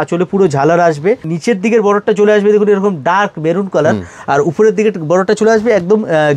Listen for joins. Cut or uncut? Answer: cut